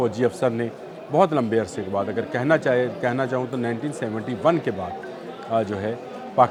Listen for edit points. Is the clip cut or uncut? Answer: uncut